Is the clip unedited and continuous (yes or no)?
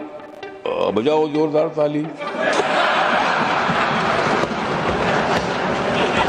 yes